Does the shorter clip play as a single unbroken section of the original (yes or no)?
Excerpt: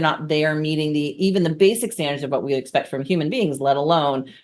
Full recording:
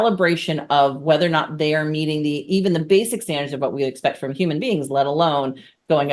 yes